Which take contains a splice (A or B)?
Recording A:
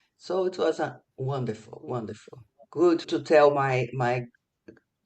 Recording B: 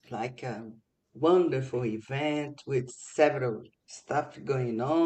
A